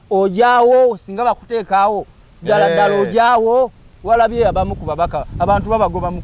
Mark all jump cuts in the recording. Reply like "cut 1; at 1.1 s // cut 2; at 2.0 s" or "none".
cut 1; at 3.9 s